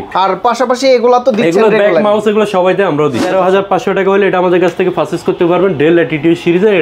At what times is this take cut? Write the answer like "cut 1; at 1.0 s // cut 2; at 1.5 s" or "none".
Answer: cut 1; at 3.2 s